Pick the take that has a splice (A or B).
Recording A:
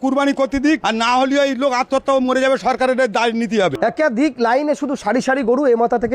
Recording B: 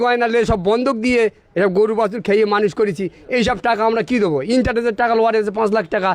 A